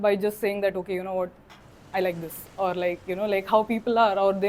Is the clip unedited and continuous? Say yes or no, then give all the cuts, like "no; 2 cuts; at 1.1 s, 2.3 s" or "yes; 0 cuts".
yes; 0 cuts